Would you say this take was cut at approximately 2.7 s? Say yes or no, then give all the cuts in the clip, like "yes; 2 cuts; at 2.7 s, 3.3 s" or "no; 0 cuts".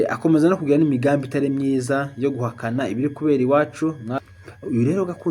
no; 1 cut; at 4.2 s